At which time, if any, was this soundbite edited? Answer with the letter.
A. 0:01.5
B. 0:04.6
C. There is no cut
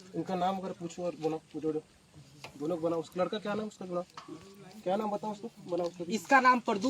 C